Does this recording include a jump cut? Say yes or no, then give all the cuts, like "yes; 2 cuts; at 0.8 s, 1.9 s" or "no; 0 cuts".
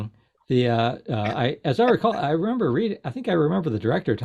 no; 0 cuts